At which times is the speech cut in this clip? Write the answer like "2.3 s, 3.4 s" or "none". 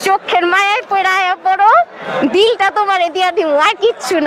none

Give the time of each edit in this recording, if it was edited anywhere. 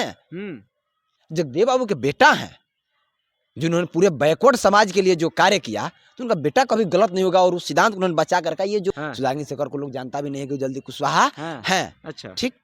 8.9 s

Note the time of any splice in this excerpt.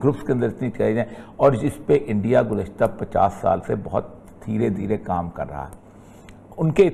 none

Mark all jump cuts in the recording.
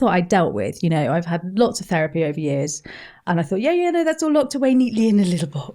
3.1 s

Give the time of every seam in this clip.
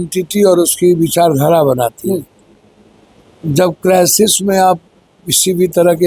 none

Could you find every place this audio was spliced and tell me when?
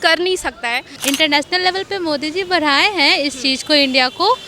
1.0 s

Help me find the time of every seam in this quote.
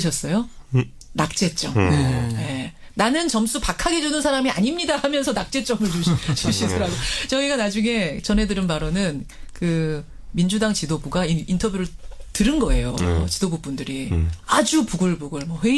10.7 s

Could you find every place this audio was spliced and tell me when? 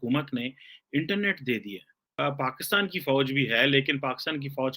2.1 s

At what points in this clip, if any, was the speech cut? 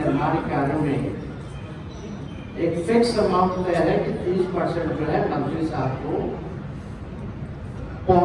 none

